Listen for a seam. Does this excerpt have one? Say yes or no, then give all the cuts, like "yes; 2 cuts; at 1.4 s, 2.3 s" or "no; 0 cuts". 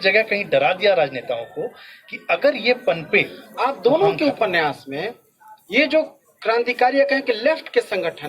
yes; 1 cut; at 3.4 s